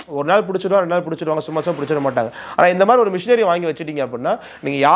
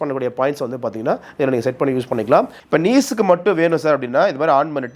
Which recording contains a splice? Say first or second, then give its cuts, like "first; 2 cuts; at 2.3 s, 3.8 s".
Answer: second; 1 cut; at 2.6 s